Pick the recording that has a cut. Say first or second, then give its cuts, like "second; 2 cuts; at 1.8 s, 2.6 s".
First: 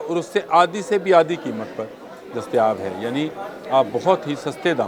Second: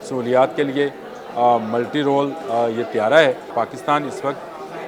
second; 1 cut; at 3.5 s